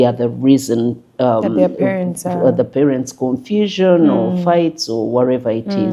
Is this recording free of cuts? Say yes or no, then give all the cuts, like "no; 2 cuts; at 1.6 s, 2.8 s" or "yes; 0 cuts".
yes; 0 cuts